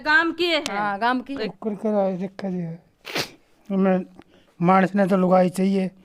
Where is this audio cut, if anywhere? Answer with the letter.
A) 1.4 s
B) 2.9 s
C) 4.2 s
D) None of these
A